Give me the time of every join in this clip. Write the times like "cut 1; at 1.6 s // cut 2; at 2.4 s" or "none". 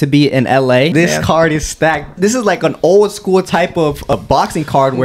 cut 1; at 0.9 s // cut 2; at 2.2 s // cut 3; at 4.1 s